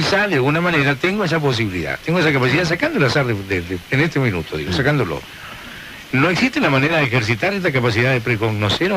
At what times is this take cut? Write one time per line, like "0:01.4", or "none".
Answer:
0:07.2